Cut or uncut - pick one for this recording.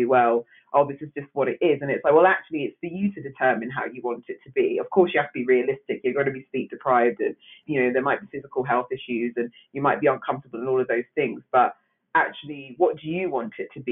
cut